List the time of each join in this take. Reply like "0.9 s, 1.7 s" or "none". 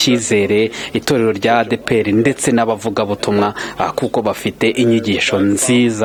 none